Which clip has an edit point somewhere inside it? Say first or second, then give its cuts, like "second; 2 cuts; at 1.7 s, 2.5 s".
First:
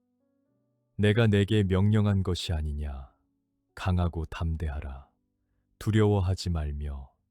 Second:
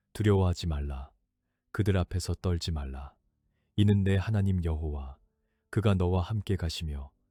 first; 1 cut; at 0.9 s